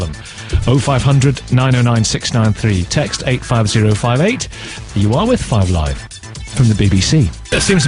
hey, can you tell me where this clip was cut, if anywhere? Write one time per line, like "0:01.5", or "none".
0:02.6